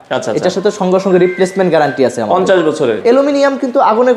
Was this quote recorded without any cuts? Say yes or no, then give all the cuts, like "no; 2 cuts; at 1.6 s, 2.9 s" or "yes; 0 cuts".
no; 1 cut; at 3.0 s